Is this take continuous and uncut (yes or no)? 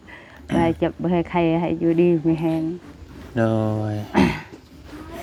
yes